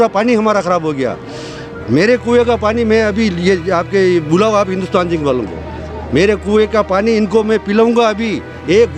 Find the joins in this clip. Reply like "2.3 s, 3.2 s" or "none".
none